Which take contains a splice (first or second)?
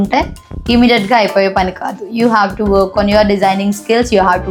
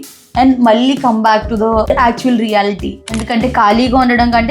second